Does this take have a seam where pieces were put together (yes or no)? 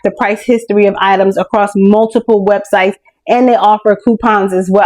no